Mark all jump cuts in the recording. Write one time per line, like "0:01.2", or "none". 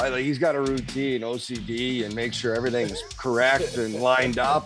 none